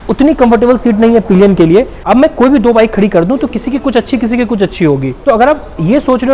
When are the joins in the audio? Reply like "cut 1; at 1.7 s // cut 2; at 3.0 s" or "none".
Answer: cut 1; at 2.0 s // cut 2; at 5.1 s